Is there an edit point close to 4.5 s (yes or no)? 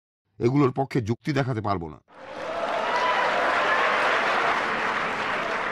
yes